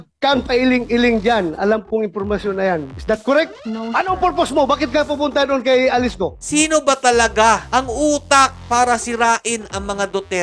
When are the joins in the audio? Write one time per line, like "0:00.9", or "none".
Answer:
0:06.4